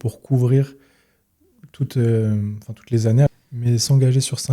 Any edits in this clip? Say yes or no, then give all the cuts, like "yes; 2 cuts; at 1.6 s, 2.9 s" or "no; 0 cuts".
yes; 1 cut; at 3.3 s